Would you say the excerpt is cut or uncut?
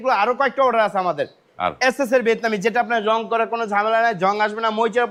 uncut